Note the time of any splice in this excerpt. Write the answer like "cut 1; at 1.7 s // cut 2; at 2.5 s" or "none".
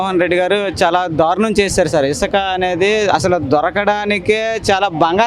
none